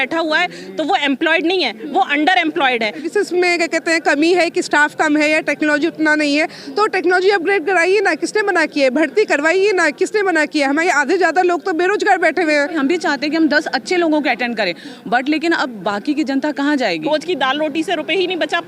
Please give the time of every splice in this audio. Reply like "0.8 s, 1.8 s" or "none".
3.1 s, 12.8 s, 17.1 s